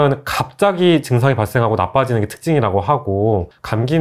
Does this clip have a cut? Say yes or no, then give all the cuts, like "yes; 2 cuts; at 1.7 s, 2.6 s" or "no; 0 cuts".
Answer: no; 0 cuts